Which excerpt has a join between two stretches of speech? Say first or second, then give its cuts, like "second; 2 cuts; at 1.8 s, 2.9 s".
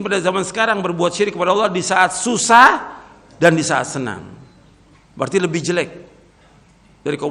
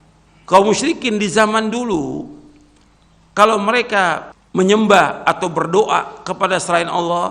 second; 1 cut; at 4.3 s